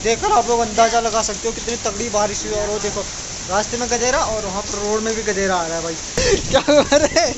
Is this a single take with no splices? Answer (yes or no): no